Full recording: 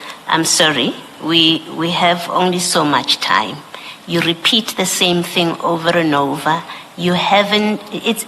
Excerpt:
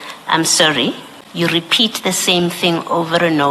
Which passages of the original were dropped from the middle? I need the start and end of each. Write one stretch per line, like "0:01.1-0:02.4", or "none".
0:01.1-0:03.8